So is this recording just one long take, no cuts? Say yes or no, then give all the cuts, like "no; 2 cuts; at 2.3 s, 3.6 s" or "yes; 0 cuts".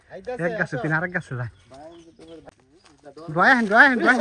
no; 1 cut; at 2.5 s